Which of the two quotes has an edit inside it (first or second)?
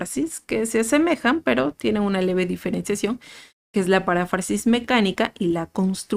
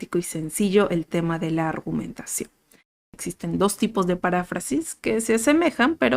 second